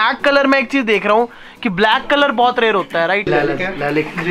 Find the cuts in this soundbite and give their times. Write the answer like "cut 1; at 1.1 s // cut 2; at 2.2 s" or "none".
cut 1; at 3.2 s